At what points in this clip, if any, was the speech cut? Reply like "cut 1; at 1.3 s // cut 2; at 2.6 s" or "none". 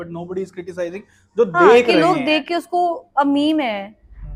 none